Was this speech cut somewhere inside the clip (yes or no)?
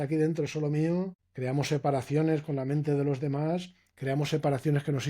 yes